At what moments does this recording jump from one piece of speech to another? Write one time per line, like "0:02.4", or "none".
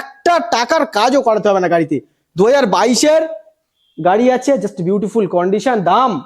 none